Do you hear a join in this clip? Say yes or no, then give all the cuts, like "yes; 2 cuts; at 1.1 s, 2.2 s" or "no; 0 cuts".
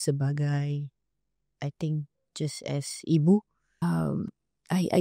yes; 1 cut; at 3.8 s